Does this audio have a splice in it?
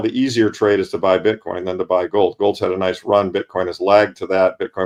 no; 0 cuts

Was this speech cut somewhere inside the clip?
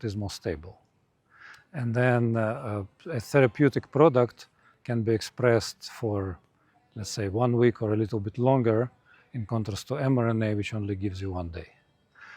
no; 0 cuts

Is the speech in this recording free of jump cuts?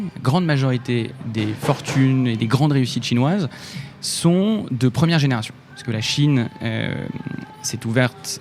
yes; 0 cuts

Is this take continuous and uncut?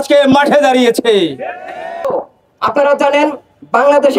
no; 1 cut; at 2.1 s

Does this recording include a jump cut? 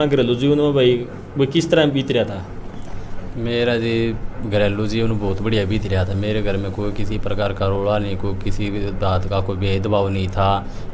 no; 0 cuts

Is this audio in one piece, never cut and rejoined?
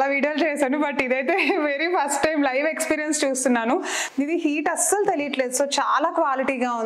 yes; 0 cuts

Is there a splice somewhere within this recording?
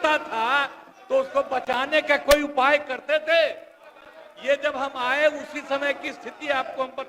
no; 0 cuts

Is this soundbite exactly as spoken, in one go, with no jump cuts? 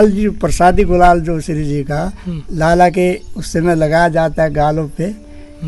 yes; 0 cuts

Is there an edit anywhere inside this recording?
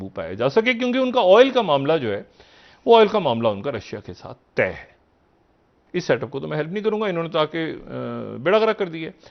no; 0 cuts

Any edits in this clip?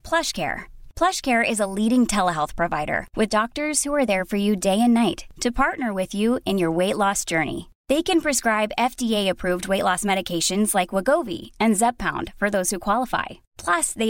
no; 0 cuts

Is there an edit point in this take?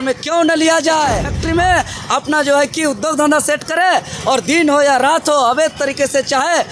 yes; 1 cut; at 1.3 s

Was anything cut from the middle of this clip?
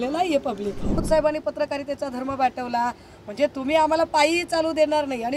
yes; 1 cut; at 1.0 s

